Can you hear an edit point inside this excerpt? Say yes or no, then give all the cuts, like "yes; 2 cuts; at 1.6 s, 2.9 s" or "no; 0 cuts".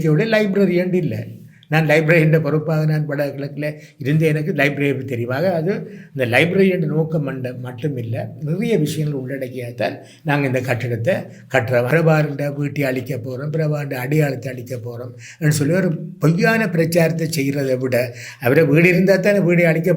yes; 1 cut; at 11.9 s